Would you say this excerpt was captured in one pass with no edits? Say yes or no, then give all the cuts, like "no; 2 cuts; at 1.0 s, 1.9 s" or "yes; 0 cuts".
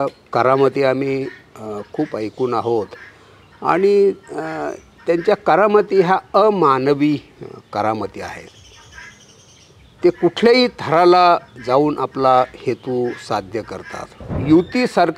no; 1 cut; at 14.3 s